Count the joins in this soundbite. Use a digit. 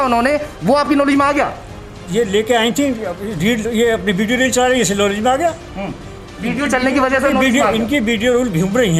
0